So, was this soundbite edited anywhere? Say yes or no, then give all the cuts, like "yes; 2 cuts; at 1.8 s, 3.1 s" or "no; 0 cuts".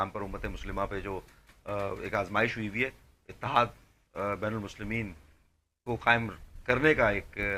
no; 0 cuts